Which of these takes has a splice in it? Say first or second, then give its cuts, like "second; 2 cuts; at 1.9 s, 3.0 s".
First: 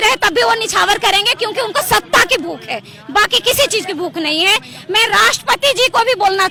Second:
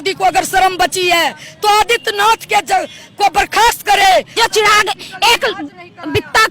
second; 1 cut; at 4.3 s